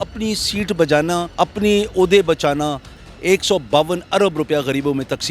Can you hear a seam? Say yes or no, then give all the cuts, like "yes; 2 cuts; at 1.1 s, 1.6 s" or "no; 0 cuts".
yes; 2 cuts; at 1.3 s, 2.9 s